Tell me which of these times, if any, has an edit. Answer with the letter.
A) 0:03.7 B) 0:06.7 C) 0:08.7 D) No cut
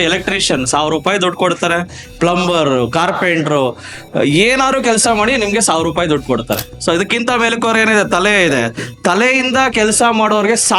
B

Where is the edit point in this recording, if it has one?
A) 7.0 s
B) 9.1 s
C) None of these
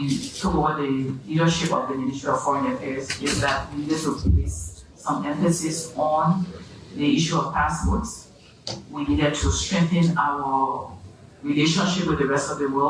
B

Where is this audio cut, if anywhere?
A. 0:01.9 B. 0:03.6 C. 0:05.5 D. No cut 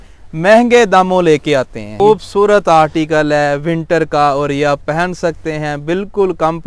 A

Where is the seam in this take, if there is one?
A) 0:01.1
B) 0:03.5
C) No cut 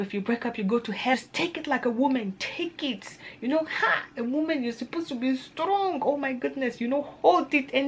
A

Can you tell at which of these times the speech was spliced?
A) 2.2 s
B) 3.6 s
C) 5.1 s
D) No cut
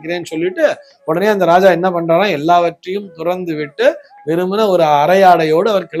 D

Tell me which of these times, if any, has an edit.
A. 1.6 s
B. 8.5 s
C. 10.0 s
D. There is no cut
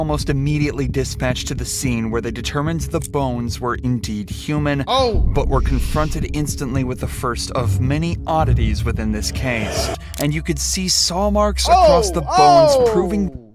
C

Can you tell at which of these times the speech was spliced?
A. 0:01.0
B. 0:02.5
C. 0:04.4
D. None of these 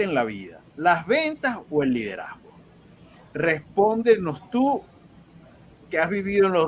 D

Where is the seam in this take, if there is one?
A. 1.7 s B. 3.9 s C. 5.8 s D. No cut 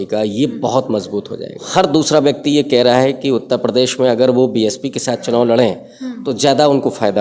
A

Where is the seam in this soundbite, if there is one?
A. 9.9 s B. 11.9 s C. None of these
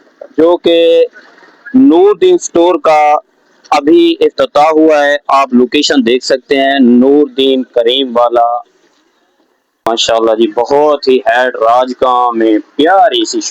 A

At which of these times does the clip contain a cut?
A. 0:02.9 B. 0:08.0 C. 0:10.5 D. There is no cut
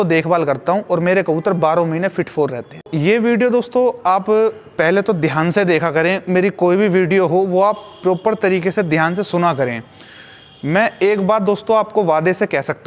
A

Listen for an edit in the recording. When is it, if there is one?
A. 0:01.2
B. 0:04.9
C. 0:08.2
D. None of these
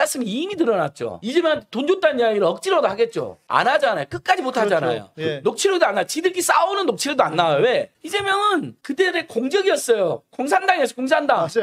A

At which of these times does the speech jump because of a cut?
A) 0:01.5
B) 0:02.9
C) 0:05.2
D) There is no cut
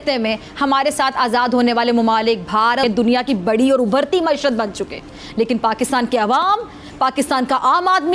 B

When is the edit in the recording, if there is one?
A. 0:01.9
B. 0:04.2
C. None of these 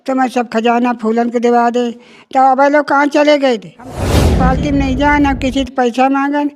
B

